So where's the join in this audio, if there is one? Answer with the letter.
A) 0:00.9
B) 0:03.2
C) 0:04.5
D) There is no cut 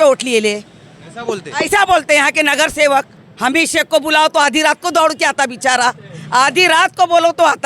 B